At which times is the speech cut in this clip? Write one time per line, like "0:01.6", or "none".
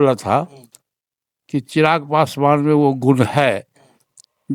none